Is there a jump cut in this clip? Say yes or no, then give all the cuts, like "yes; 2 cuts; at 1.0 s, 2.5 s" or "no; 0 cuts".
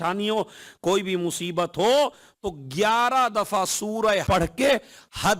yes; 1 cut; at 4.2 s